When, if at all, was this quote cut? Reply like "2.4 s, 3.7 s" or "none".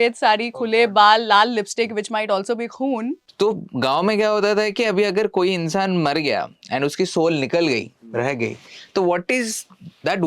3.2 s